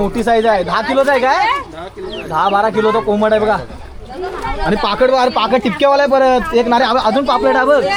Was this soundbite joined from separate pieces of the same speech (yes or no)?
no